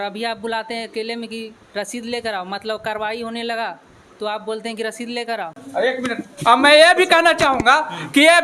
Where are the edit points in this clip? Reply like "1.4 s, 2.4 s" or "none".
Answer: 5.6 s